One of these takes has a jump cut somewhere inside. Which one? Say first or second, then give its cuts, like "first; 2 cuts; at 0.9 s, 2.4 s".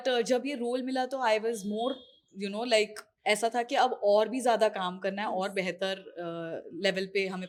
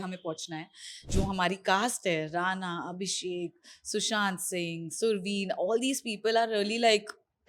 second; 1 cut; at 1.1 s